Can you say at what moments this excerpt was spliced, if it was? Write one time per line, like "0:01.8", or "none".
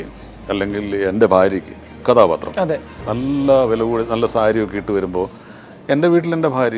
0:03.0